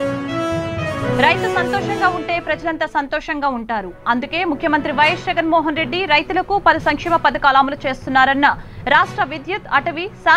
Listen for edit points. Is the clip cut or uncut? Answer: cut